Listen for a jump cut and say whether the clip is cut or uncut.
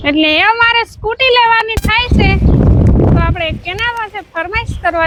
uncut